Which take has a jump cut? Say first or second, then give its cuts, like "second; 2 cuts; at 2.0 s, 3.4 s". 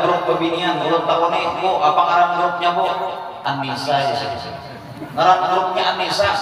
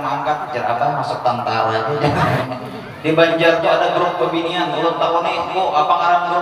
second; 1 cut; at 2.4 s